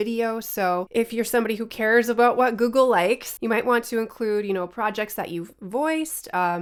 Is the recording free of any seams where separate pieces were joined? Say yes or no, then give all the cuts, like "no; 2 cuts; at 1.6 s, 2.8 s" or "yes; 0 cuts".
yes; 0 cuts